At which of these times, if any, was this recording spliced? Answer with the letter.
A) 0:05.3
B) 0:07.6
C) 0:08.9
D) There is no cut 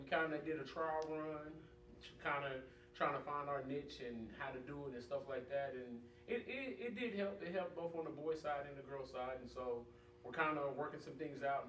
A